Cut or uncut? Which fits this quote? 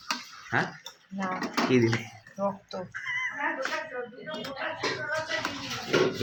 uncut